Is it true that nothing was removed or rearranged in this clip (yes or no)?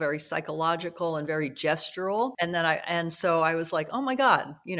yes